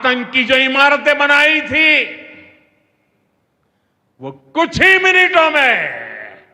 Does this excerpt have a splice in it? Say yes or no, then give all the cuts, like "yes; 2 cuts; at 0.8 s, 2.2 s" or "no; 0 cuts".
no; 0 cuts